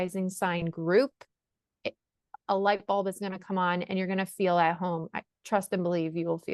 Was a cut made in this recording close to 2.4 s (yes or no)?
yes